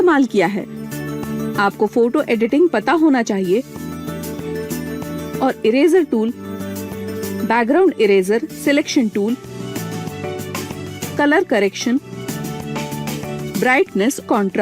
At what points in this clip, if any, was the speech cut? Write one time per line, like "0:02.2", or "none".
0:01.1